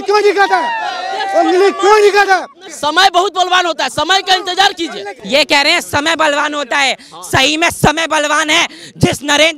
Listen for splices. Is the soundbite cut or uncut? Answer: cut